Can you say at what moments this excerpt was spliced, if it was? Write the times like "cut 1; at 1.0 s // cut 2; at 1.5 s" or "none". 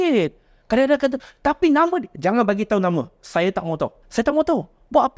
cut 1; at 4.0 s

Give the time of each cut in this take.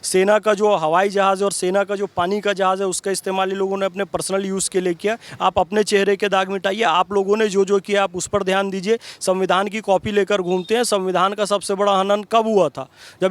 cut 1; at 5.3 s

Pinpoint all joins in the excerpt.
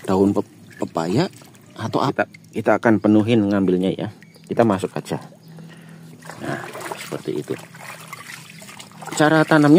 cut 1; at 2.1 s

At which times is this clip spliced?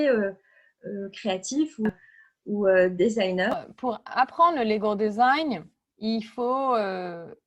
cut 1; at 1.9 s // cut 2; at 3.5 s

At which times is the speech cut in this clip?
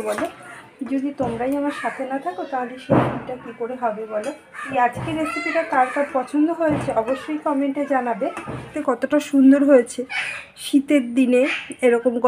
cut 1; at 4.5 s // cut 2; at 8.7 s

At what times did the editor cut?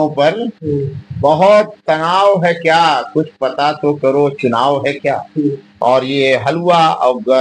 cut 1; at 5.7 s

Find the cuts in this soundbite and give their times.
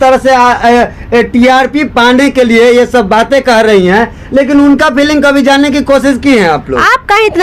none

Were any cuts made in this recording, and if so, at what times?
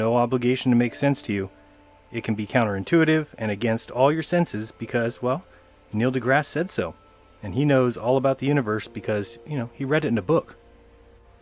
cut 1; at 5.5 s

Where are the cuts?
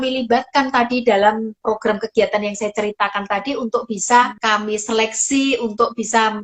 cut 1; at 1.6 s // cut 2; at 4.4 s

